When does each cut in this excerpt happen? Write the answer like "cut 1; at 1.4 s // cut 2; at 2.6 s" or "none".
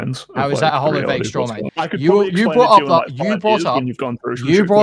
cut 1; at 1.6 s